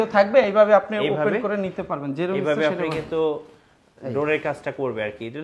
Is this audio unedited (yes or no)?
yes